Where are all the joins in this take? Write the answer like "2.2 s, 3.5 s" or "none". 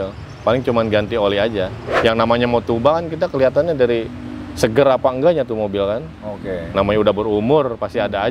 1.8 s